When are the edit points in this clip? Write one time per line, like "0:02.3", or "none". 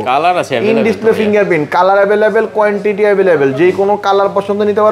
none